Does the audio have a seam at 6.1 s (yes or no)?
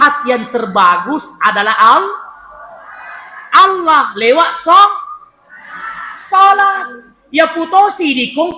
no